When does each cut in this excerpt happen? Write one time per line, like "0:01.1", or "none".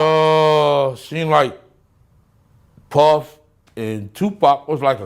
none